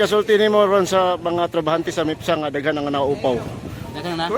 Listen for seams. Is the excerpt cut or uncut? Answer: uncut